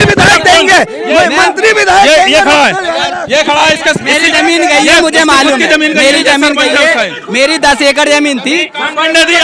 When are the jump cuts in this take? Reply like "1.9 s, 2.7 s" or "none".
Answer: none